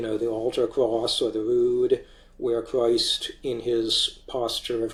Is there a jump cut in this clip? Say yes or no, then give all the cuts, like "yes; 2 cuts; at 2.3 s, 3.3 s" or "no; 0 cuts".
no; 0 cuts